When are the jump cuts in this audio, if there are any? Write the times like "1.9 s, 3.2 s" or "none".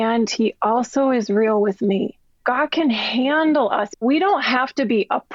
2.3 s, 4.0 s